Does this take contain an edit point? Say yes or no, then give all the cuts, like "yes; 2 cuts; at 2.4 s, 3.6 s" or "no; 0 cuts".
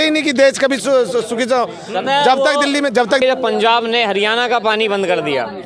yes; 1 cut; at 3.2 s